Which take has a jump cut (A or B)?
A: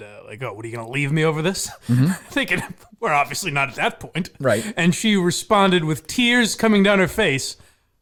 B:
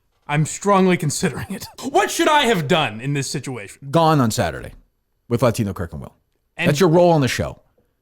B